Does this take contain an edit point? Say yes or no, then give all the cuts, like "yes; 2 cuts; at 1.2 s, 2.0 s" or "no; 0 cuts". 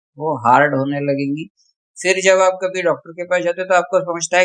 no; 0 cuts